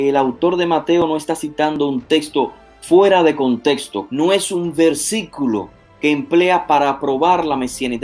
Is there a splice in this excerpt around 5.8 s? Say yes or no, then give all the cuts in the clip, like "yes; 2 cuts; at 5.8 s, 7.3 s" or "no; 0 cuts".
no; 1 cut; at 3.9 s